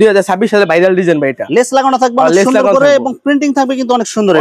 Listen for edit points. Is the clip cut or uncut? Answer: uncut